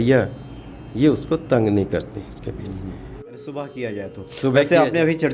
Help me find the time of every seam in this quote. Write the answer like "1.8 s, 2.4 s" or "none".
3.4 s